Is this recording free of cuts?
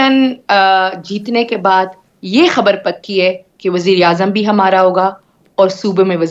yes; 0 cuts

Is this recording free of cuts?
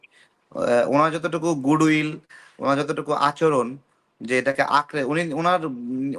yes; 0 cuts

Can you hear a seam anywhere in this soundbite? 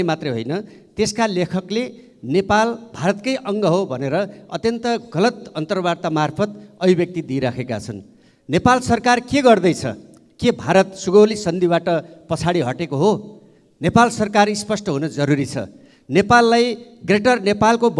no; 0 cuts

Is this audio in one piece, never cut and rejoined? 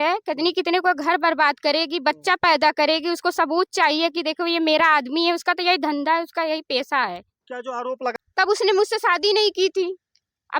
no; 1 cut; at 8.1 s

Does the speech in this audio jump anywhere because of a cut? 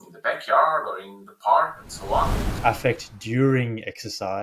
yes; 1 cut; at 2.4 s

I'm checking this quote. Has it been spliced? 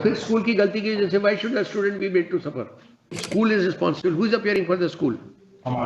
yes; 1 cut; at 3.2 s

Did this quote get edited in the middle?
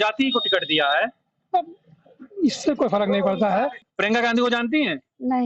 yes; 1 cut; at 3.8 s

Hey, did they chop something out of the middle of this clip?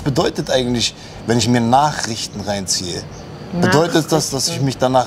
no; 0 cuts

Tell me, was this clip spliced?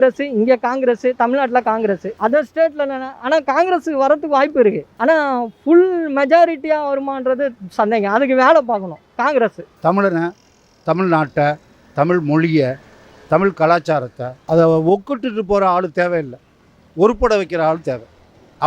yes; 3 cuts; at 2.1 s, 4.9 s, 9.7 s

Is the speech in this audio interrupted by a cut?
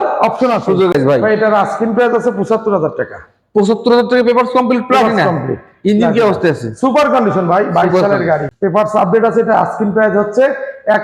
yes; 2 cuts; at 0.9 s, 8.5 s

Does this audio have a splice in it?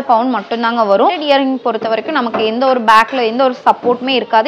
yes; 1 cut; at 1.2 s

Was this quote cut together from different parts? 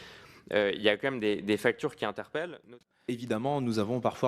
yes; 1 cut; at 2.7 s

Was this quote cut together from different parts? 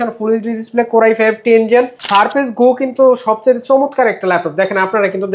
yes; 1 cut; at 2.0 s

